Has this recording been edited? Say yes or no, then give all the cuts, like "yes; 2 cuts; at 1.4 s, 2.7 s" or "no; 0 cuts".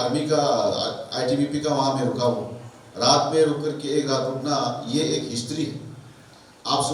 no; 0 cuts